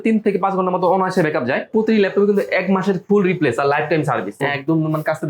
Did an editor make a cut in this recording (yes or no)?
yes